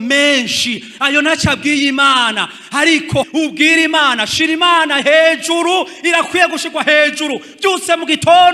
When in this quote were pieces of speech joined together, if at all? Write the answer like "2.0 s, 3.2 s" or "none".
3.3 s

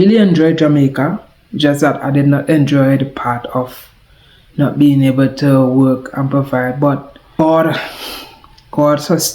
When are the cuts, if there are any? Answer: 7.2 s

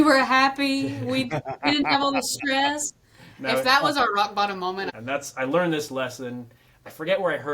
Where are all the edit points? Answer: 4.9 s

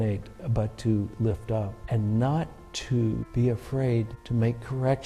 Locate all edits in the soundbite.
1.8 s, 3.3 s, 4.2 s

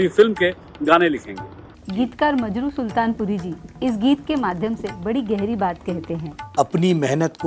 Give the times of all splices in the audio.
1.8 s, 6.3 s

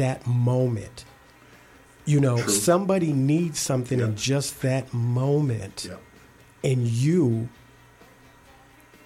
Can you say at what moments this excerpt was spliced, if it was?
none

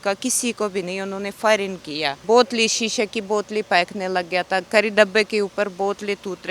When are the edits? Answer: 2.2 s

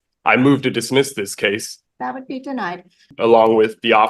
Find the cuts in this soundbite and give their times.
1.7 s, 3.1 s

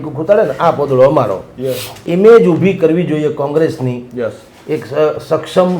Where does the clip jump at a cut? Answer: 2.1 s

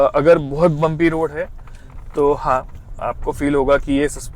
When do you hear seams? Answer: none

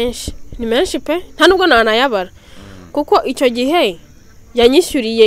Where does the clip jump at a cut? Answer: none

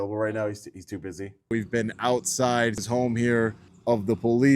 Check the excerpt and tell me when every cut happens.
1.5 s, 2.8 s, 3.7 s

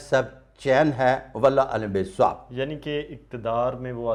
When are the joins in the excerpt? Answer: none

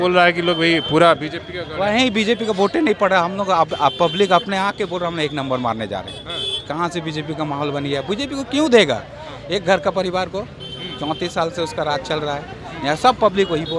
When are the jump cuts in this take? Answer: none

